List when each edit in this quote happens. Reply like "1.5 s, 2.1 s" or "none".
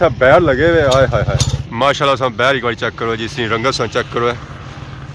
1.5 s

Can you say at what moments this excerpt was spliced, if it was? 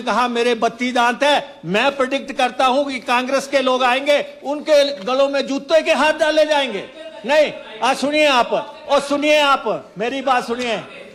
none

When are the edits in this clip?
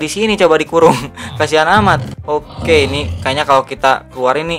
2.1 s

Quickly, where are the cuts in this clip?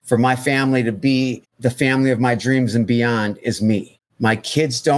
1.5 s, 4.0 s

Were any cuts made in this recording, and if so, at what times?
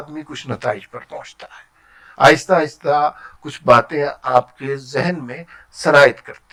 none

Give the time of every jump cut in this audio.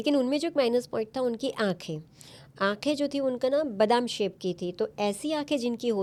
none

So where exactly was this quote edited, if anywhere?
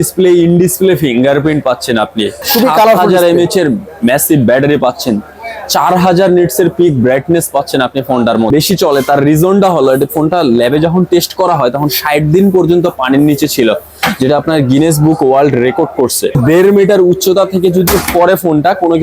2.5 s, 8.5 s, 16.4 s

